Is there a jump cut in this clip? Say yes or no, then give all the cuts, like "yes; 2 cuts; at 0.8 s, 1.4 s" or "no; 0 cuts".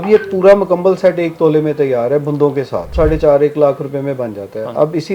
yes; 1 cut; at 2.9 s